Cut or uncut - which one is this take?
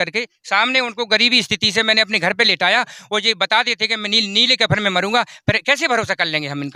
uncut